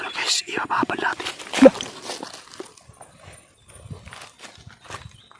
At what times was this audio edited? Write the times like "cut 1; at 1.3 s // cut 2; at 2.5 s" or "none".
cut 1; at 1.2 s